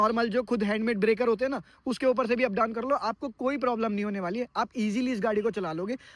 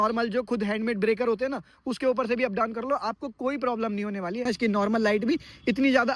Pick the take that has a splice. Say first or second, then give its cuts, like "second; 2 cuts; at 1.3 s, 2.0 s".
second; 1 cut; at 4.4 s